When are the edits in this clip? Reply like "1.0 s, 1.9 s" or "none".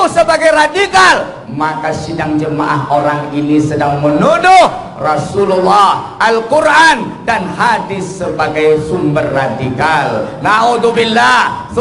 none